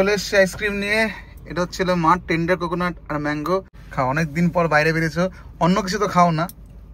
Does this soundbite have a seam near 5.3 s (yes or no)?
no